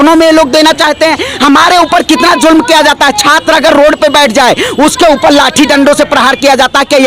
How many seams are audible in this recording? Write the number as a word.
zero